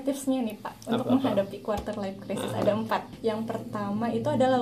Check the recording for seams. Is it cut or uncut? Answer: cut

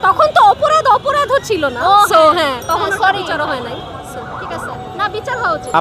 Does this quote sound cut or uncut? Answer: uncut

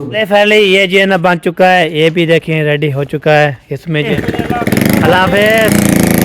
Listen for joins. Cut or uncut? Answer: cut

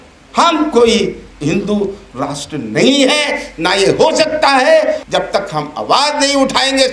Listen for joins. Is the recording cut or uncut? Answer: cut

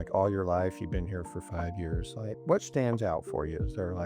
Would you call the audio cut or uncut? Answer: cut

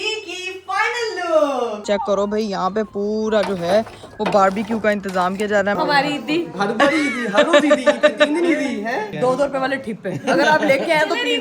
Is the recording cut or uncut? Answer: cut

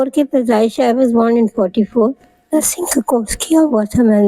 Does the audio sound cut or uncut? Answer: cut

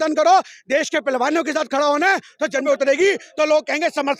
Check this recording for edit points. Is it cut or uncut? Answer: cut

